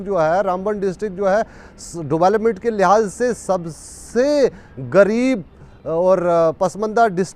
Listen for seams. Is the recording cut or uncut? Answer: uncut